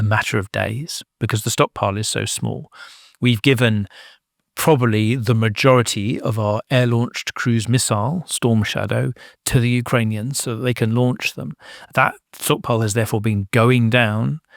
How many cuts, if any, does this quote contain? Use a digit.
1